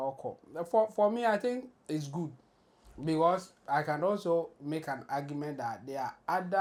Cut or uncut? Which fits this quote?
uncut